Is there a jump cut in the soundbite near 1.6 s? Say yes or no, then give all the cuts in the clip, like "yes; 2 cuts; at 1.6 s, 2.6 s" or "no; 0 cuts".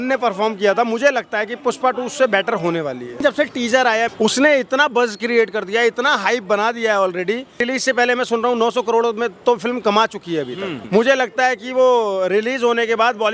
no; 4 cuts; at 3.2 s, 4.1 s, 7.6 s, 10.7 s